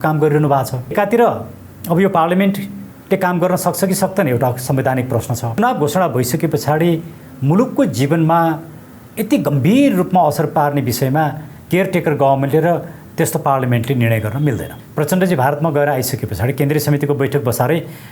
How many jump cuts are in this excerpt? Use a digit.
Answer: 3